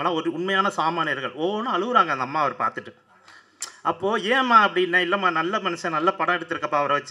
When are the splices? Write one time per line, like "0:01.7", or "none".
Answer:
none